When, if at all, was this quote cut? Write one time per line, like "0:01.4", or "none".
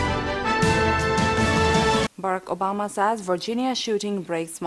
none